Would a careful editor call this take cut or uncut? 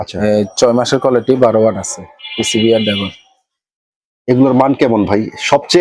uncut